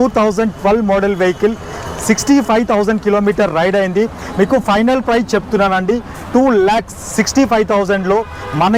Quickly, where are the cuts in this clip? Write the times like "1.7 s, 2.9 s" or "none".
none